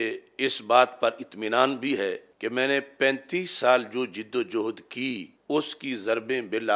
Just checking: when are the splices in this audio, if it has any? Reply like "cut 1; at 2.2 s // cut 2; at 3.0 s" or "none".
cut 1; at 2.3 s // cut 2; at 5.3 s